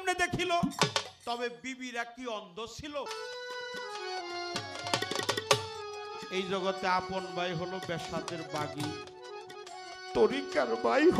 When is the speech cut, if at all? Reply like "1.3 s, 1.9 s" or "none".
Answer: 3.1 s